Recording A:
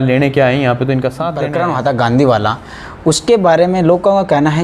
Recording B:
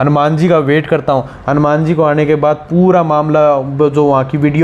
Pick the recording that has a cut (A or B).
A